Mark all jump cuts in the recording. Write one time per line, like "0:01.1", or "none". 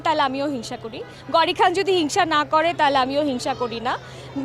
none

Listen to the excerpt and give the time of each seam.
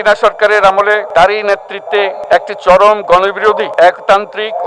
0:01.1
0:02.2
0:03.7

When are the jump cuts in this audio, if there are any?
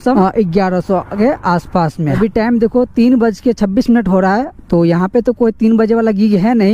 0:02.2

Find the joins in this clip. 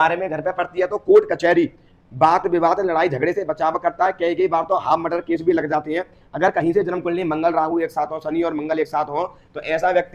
none

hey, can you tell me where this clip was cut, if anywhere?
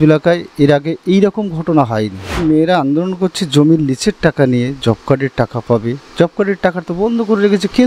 0:02.4

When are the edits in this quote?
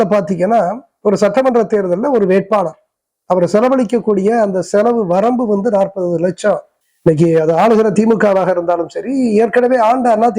0:06.8

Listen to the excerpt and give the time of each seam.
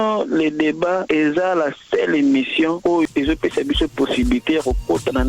0:03.1

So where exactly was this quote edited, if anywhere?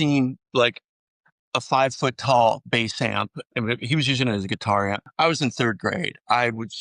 0:05.0

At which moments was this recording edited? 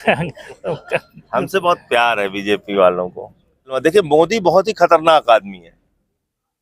0:03.8

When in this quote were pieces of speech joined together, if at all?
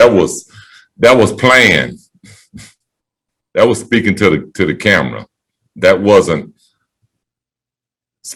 none

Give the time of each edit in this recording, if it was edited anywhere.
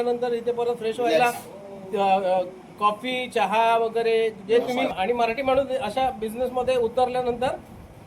0:04.9

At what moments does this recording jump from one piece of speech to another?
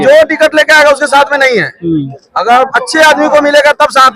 none

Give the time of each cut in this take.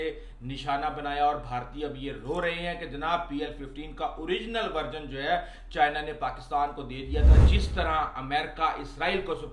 0:07.4

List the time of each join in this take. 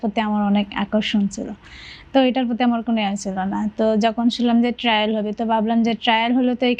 none

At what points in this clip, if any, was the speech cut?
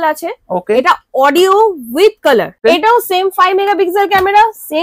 0:02.6

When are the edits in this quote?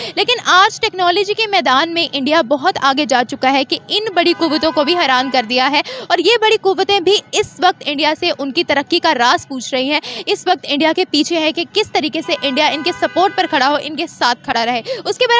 none

